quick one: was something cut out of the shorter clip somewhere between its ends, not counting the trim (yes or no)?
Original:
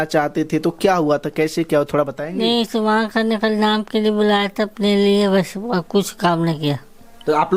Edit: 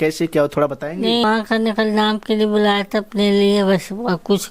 yes